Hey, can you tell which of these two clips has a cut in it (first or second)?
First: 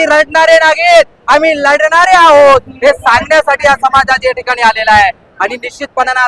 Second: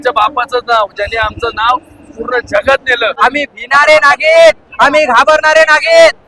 second